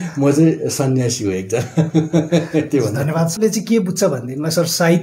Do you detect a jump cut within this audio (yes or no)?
yes